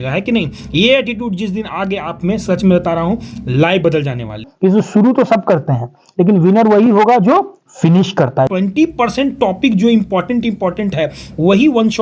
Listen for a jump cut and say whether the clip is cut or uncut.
cut